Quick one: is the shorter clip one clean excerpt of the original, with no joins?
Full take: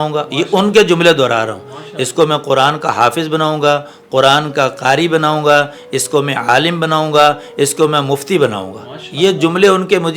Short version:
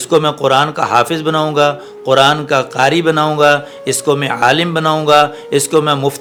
yes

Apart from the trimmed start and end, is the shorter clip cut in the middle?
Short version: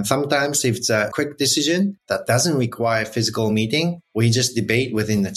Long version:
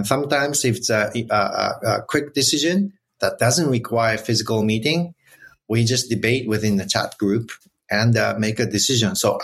yes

